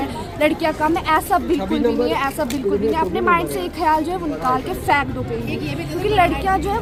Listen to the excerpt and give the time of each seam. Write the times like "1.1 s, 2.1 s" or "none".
none